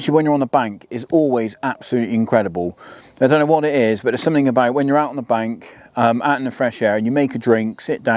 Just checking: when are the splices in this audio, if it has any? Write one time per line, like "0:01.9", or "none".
none